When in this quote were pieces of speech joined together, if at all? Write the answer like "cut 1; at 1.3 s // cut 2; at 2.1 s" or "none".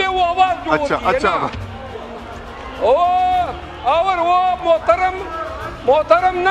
none